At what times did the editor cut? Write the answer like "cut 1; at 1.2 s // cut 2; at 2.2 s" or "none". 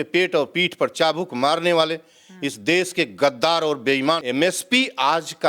cut 1; at 4.2 s